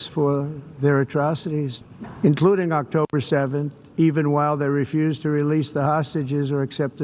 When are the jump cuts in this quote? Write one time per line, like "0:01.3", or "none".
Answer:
0:01.8